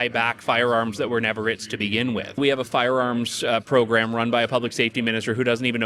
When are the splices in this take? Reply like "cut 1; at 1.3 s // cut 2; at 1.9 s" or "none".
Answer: cut 1; at 2.4 s